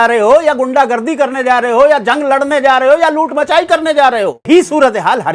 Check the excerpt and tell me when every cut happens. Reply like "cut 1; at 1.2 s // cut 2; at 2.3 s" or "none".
cut 1; at 4.5 s